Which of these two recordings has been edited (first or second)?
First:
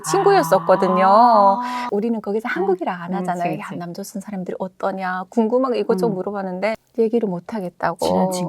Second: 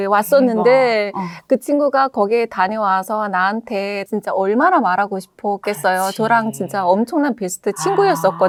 first